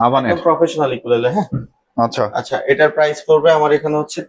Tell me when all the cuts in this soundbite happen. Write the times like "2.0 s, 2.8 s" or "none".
none

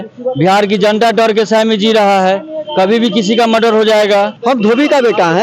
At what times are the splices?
4.3 s

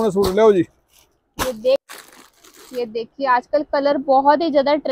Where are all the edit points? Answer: 1.8 s

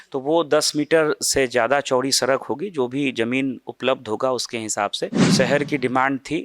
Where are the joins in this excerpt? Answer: 5.2 s

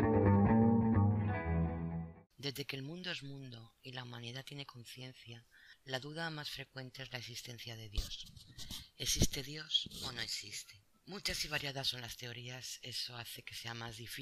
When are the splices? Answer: 5.6 s

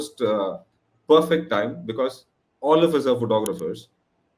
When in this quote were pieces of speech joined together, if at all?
none

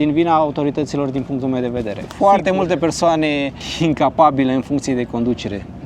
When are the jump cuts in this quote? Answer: 2.0 s

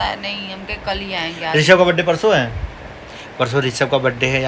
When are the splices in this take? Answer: none

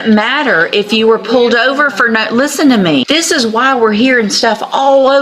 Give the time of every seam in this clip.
3.0 s

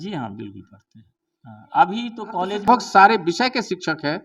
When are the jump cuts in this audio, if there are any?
2.7 s

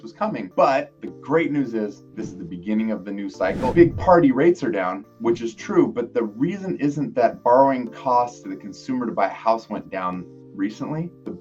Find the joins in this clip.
3.7 s

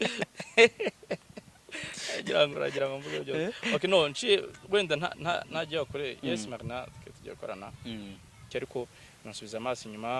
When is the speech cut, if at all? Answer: 8.4 s

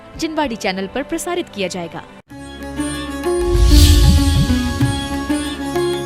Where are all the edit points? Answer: 2.2 s

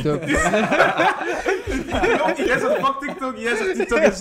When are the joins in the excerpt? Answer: 2.5 s

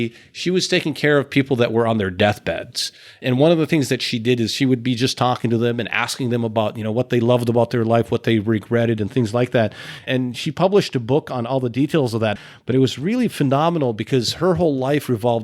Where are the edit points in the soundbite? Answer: 3.2 s, 12.4 s

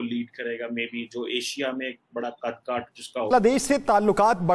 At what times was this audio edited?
3.3 s

